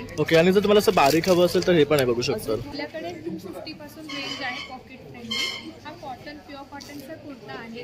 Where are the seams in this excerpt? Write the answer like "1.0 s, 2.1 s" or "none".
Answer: 2.7 s